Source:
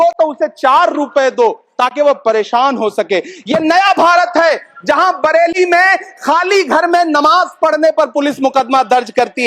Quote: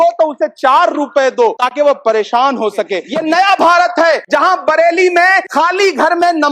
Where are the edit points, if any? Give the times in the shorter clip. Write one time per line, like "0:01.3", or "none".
0:01.6
0:03.0
0:04.2
0:05.5